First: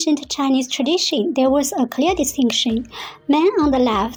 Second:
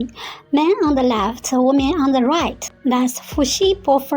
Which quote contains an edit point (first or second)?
second